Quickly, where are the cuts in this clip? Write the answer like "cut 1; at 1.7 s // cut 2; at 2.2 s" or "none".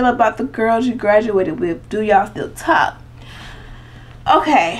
none